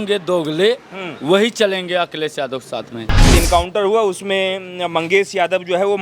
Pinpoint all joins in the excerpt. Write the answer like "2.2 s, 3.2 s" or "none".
3.3 s